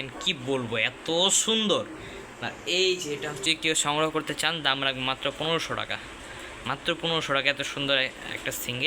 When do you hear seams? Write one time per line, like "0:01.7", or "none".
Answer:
0:03.4